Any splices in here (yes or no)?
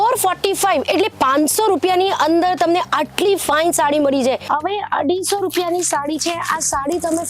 yes